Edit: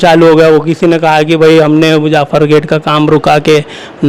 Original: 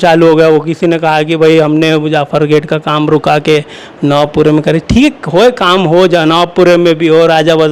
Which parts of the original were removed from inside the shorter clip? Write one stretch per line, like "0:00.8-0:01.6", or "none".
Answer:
none